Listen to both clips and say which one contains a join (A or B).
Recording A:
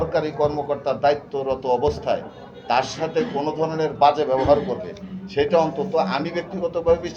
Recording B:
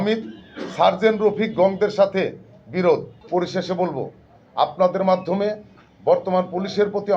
B